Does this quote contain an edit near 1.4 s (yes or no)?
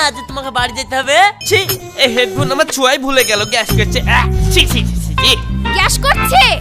yes